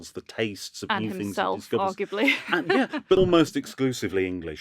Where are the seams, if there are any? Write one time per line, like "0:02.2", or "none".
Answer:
0:03.2